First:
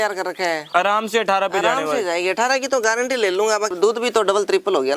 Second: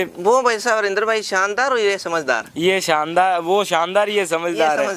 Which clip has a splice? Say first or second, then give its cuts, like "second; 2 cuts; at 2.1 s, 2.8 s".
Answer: first; 1 cut; at 3.7 s